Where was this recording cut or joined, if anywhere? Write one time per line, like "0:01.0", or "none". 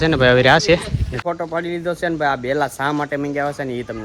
0:01.1